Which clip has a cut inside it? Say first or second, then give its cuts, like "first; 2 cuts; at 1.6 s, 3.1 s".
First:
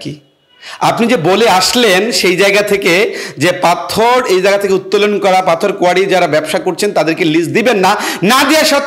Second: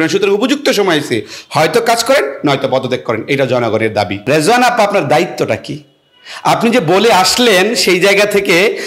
second; 1 cut; at 4.2 s